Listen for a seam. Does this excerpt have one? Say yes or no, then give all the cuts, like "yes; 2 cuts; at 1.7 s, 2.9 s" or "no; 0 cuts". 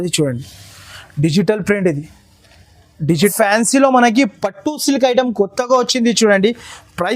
yes; 1 cut; at 3.3 s